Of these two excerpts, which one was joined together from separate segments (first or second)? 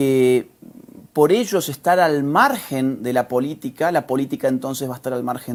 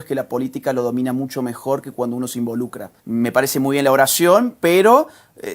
second